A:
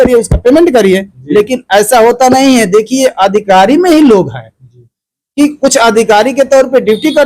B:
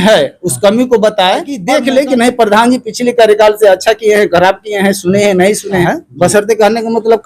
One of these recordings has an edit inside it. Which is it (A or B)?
B